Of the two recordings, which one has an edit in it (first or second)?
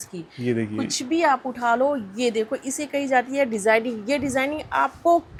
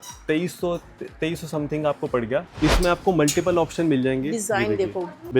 second